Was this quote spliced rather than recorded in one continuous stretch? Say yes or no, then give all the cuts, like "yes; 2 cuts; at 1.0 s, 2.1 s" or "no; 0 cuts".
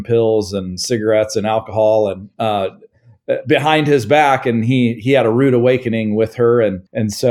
no; 0 cuts